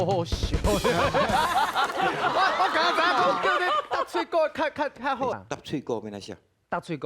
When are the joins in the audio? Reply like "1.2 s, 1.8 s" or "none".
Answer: 5.3 s